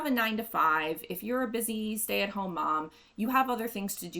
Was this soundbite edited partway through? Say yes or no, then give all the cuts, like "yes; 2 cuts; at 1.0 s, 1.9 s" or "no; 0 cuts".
no; 0 cuts